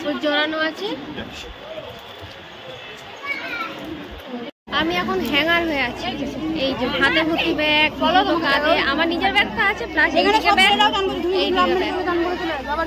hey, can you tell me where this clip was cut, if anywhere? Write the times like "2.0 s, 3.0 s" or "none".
4.6 s